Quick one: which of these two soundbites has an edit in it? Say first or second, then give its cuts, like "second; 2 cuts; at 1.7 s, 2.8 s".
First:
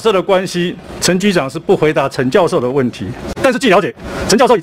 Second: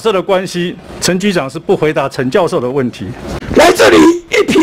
second; 1 cut; at 3.3 s